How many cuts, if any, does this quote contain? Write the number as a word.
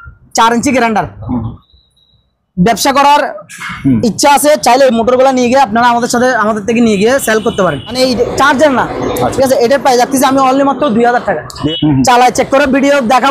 three